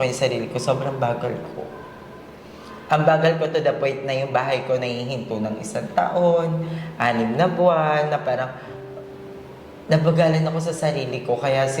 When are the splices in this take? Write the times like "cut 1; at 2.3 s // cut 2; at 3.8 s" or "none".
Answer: none

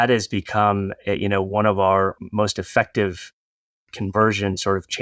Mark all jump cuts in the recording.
cut 1; at 2.2 s

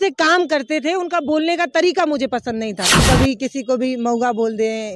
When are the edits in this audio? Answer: cut 1; at 3.0 s

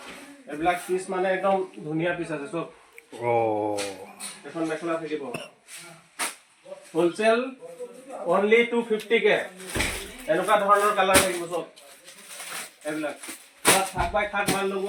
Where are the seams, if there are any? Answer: none

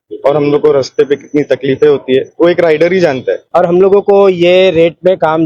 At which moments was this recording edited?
cut 1; at 3.4 s

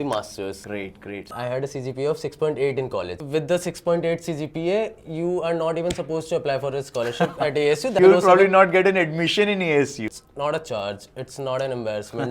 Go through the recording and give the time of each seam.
cut 1; at 1.2 s // cut 2; at 3.1 s // cut 3; at 7.9 s // cut 4; at 10.0 s

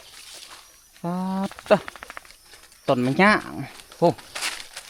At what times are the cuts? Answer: none

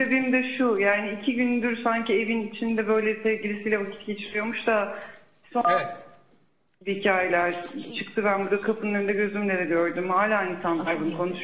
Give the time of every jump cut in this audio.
none

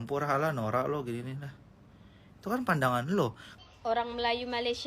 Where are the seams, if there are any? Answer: cut 1; at 3.5 s

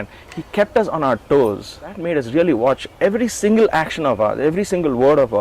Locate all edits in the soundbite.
cut 1; at 2.0 s

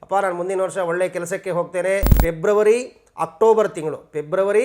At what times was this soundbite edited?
cut 1; at 2.1 s

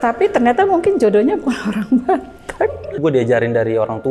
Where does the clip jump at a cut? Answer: cut 1; at 2.8 s

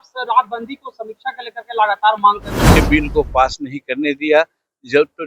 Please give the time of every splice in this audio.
cut 1; at 2.8 s

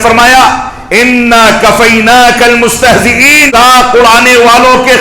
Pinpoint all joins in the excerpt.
cut 1; at 3.5 s

